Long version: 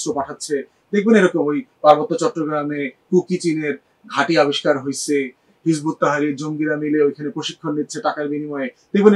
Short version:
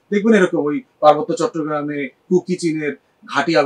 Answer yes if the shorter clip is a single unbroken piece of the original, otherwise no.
yes